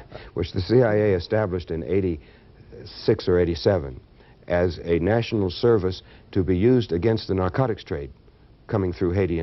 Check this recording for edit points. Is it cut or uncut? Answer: uncut